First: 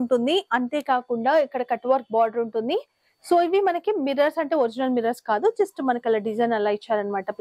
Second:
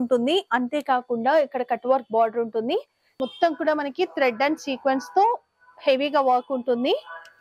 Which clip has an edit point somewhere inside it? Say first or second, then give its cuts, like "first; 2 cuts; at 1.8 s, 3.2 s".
second; 1 cut; at 3.1 s